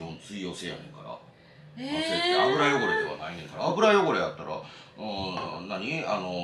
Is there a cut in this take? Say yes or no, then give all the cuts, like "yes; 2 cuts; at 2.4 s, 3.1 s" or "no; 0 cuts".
no; 0 cuts